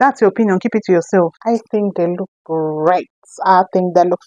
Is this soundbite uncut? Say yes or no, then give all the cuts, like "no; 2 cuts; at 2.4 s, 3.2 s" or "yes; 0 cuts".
no; 1 cut; at 1.4 s